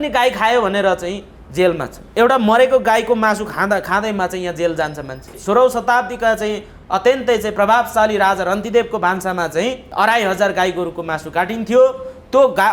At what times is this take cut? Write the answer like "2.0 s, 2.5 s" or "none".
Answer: 1.9 s, 5.4 s, 9.8 s